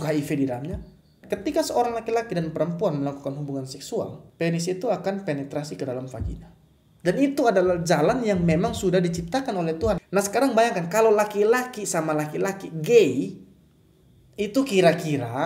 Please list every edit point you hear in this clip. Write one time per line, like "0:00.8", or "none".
0:01.2
0:04.2
0:10.0